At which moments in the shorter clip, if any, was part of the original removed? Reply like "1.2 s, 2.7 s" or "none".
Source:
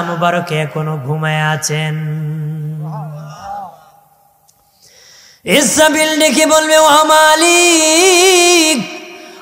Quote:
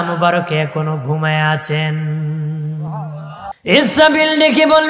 3.5 s